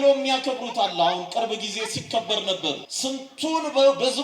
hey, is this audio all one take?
no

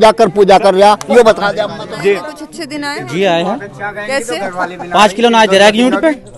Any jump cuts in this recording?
yes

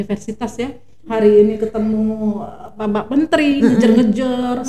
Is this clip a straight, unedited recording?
no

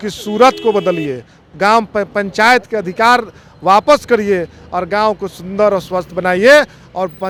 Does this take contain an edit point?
no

